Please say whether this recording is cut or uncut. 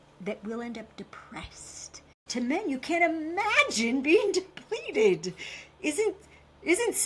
cut